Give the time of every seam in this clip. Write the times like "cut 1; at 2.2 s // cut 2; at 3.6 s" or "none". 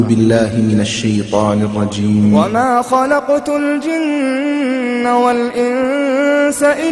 cut 1; at 2.5 s